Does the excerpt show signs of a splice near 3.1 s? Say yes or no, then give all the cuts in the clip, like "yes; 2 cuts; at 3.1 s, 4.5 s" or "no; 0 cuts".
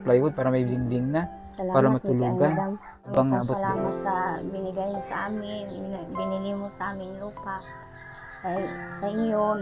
yes; 1 cut; at 3.1 s